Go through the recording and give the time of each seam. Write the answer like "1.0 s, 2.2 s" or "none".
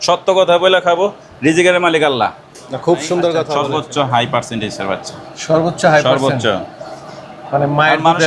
3.5 s